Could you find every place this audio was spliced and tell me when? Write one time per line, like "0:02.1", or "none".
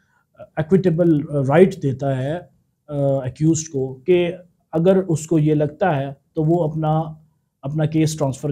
none